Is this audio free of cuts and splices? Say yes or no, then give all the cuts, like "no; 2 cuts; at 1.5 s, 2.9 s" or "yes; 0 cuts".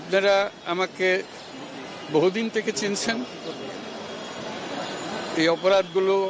yes; 0 cuts